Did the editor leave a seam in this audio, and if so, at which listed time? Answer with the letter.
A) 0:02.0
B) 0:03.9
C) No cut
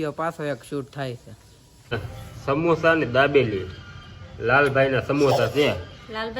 A